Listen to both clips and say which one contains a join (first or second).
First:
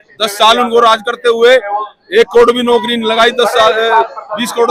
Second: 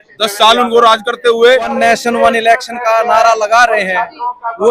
second